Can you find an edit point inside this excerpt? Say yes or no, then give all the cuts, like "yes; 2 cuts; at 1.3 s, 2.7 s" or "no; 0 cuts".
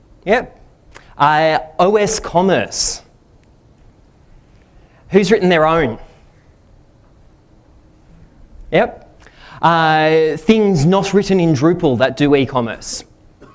yes; 1 cut; at 12.3 s